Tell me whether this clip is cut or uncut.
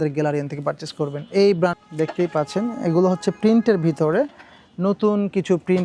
cut